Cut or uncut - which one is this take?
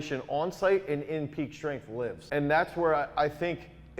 cut